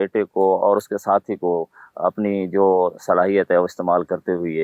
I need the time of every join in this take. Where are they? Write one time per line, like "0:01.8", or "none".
none